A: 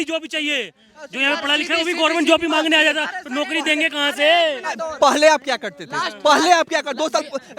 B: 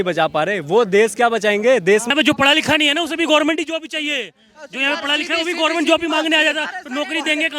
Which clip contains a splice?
B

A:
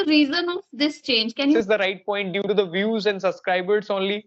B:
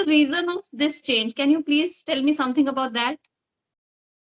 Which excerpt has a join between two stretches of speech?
A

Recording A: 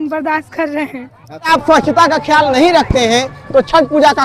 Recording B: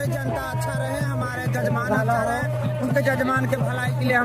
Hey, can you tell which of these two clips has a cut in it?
A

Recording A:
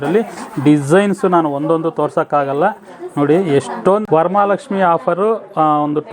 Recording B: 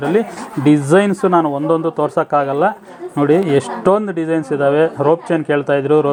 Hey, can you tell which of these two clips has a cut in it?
A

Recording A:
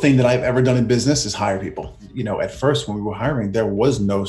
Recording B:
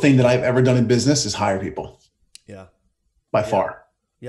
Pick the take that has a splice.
A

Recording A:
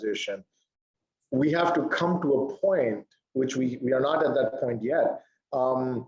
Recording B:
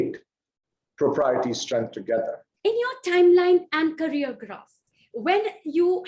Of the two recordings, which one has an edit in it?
B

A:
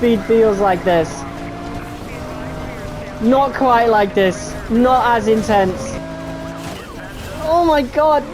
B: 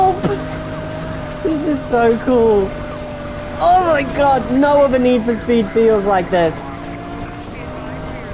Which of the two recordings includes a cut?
A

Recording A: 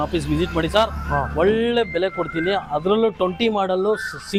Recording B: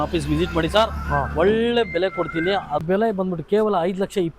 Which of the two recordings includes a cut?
B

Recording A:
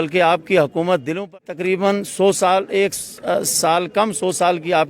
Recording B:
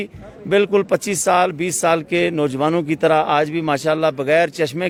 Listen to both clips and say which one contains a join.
A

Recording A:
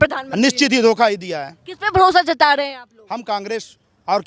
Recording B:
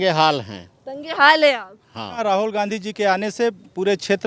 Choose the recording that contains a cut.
B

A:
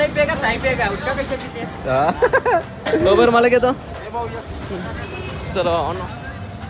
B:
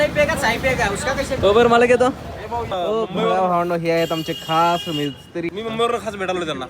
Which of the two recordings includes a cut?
B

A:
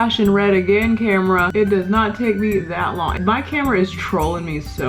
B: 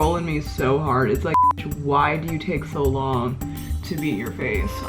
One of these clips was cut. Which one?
A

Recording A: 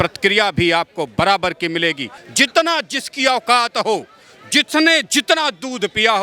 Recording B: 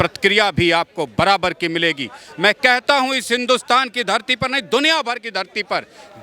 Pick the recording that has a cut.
A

